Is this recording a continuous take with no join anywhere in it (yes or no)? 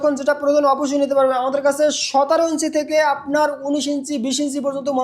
yes